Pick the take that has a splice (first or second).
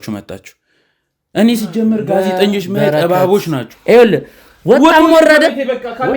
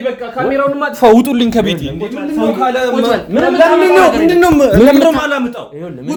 first